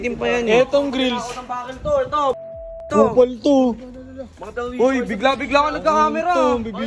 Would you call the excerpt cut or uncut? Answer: uncut